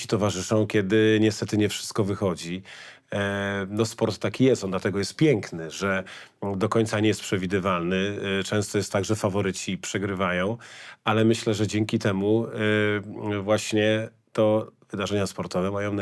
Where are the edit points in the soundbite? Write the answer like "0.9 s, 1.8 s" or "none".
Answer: none